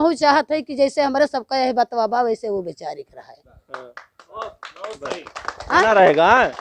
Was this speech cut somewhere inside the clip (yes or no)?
no